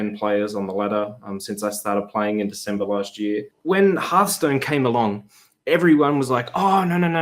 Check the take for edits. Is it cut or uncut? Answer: cut